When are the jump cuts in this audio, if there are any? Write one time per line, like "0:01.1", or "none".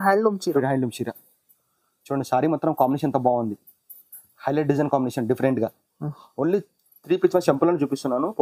none